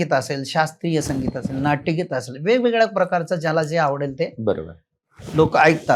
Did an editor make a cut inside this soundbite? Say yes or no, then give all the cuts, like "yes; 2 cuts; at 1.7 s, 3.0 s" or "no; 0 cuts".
no; 0 cuts